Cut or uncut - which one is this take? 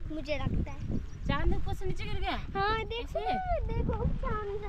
uncut